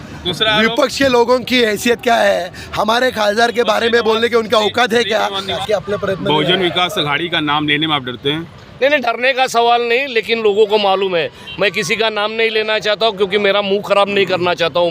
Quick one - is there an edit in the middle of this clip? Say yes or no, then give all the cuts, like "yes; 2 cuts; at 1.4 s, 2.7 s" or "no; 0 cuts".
yes; 1 cut; at 5.5 s